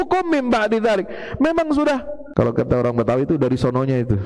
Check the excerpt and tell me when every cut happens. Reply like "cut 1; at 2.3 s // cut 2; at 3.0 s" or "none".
cut 1; at 2.2 s